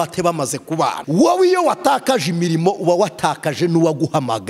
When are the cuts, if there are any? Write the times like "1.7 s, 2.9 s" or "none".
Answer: 1.0 s